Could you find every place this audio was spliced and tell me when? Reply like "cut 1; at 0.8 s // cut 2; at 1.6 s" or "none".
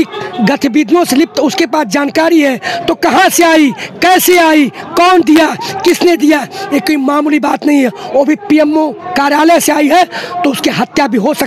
none